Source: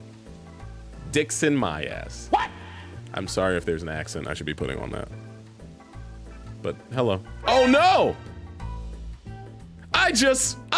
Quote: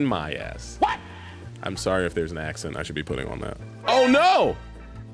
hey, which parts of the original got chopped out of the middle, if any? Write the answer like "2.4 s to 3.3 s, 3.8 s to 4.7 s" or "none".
5.2 s to 7.3 s